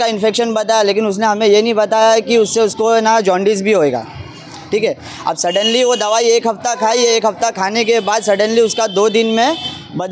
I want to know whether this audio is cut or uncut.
uncut